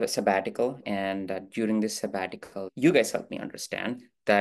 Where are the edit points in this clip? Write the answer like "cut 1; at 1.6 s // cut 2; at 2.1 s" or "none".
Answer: cut 1; at 0.8 s // cut 2; at 2.7 s